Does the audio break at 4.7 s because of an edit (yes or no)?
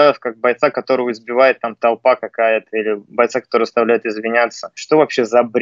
yes